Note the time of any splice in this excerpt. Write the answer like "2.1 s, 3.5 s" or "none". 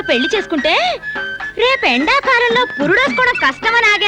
none